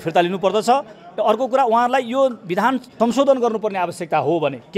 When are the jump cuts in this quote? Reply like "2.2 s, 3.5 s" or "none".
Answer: 2.9 s